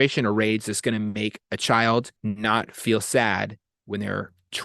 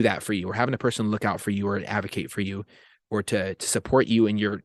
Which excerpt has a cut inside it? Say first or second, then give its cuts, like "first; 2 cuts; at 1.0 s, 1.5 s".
first; 1 cut; at 2.1 s